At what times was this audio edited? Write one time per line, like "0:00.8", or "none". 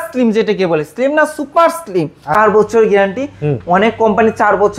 0:02.4